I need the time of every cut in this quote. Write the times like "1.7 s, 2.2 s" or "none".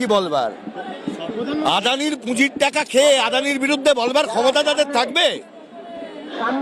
none